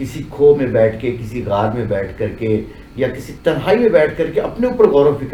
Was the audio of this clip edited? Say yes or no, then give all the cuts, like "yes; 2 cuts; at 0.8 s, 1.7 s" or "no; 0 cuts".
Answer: no; 0 cuts